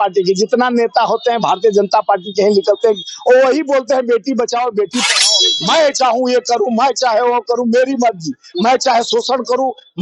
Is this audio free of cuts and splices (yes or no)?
no